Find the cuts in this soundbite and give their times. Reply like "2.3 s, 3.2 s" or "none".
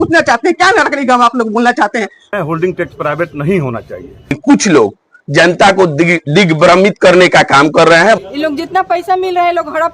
2.4 s, 4.4 s, 8.2 s

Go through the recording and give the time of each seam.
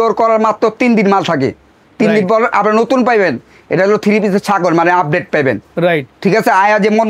none

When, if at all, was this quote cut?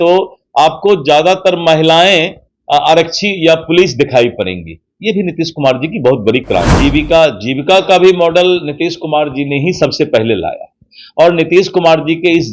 6.7 s

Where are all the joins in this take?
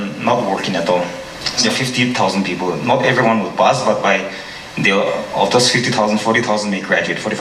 1.6 s

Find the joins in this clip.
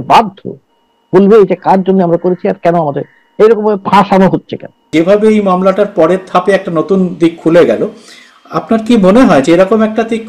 4.9 s

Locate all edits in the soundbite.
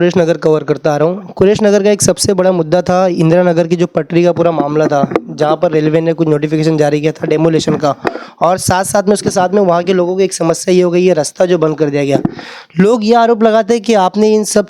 none

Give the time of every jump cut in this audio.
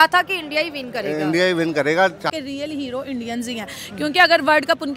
2.3 s

